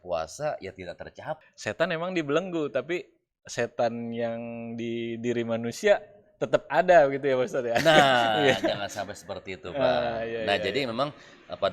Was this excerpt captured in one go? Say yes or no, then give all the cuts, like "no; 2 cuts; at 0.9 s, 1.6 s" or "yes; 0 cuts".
no; 1 cut; at 1.4 s